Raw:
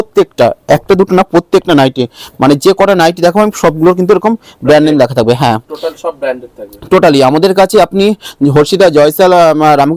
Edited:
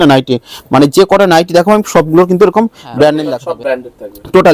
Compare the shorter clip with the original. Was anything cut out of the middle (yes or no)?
yes